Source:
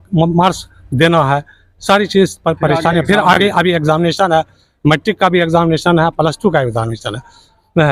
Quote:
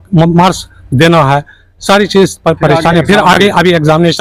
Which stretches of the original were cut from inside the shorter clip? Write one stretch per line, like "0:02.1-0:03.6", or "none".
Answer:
none